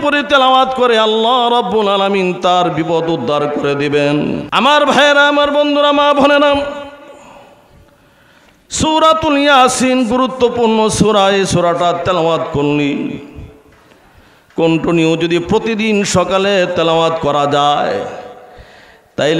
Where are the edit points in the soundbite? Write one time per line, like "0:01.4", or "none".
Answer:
0:04.4